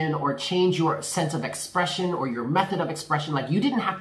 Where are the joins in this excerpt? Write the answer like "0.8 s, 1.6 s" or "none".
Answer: none